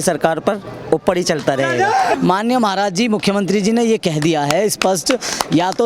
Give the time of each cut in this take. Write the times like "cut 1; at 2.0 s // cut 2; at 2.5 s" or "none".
cut 1; at 2.1 s